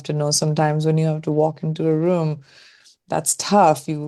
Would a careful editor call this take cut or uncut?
uncut